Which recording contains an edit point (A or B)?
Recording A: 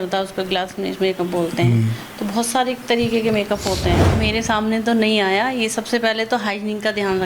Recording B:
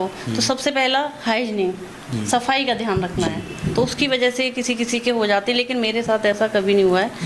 A